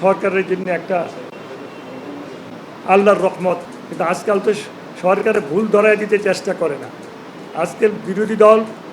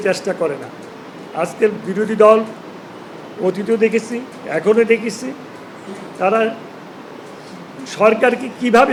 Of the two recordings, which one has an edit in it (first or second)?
first